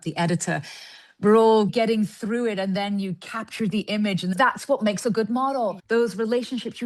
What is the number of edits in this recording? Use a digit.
3